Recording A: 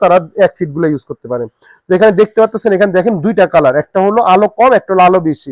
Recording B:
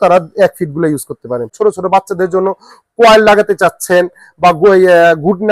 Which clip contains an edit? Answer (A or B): B